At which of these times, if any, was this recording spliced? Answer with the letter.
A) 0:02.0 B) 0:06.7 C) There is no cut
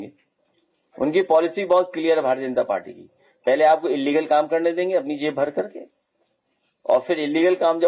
C